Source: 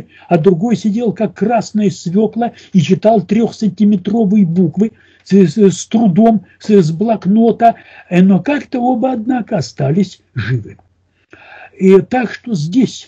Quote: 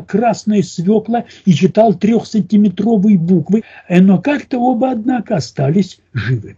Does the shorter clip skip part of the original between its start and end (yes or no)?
yes